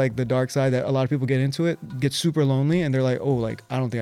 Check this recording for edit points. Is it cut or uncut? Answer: uncut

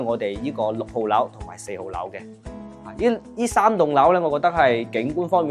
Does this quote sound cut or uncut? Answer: uncut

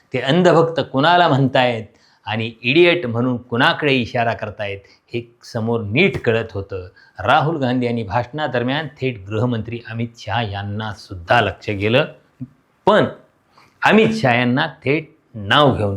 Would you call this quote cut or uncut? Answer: uncut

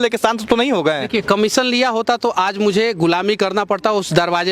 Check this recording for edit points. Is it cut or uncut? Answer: uncut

